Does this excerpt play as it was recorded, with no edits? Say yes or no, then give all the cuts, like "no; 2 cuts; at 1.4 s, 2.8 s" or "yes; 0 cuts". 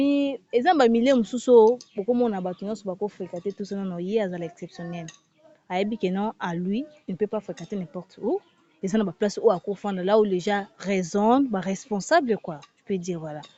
yes; 0 cuts